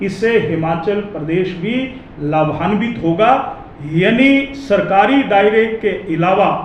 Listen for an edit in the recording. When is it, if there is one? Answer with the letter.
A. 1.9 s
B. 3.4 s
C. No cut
C